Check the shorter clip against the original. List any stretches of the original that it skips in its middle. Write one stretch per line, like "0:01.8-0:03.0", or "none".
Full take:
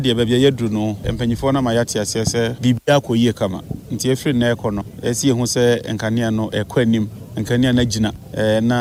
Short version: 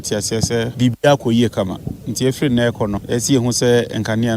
0:04.8-0:04.9